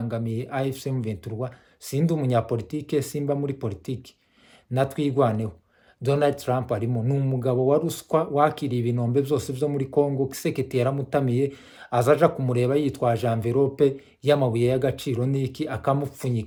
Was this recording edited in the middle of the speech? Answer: no; 0 cuts

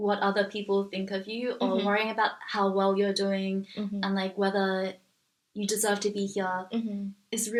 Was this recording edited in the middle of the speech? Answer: no; 0 cuts

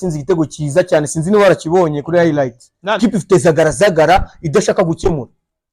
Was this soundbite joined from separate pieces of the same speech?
yes; 1 cut; at 3.0 s

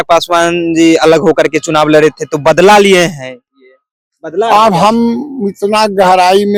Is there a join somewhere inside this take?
no; 0 cuts

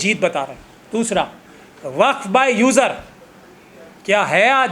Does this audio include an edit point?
no; 0 cuts

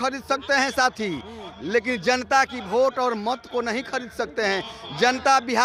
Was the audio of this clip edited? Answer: no; 0 cuts

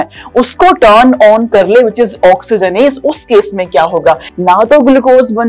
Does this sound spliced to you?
yes; 1 cut; at 4.3 s

